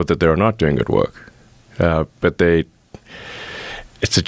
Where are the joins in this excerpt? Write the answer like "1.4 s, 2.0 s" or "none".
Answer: none